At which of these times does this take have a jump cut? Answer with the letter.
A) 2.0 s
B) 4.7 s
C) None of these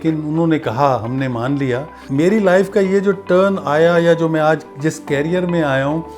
A